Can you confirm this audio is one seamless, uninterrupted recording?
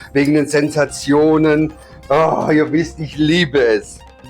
yes; 0 cuts

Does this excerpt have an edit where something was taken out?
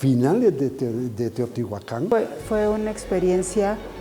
yes; 1 cut; at 2.4 s

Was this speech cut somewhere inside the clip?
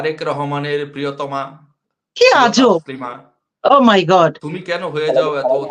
no; 0 cuts

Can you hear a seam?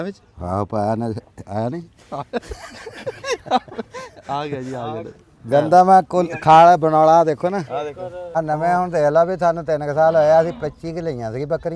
yes; 1 cut; at 8.3 s

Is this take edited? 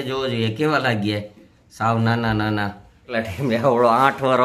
yes; 1 cut; at 3.1 s

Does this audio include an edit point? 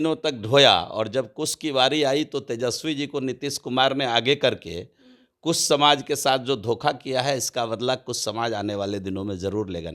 no; 0 cuts

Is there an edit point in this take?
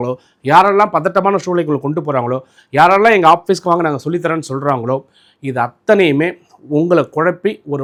no; 0 cuts

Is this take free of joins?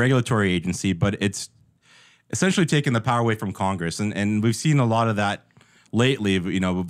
yes; 0 cuts

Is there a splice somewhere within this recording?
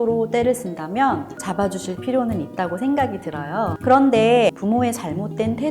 yes; 3 cuts; at 1.4 s, 3.8 s, 4.6 s

